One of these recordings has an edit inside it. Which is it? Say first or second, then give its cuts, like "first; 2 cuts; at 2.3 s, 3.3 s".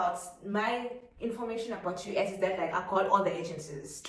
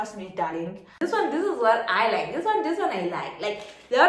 second; 1 cut; at 0.9 s